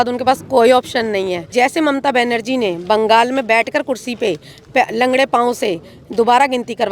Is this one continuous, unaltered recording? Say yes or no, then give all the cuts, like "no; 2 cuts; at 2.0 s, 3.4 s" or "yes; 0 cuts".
no; 1 cut; at 1.5 s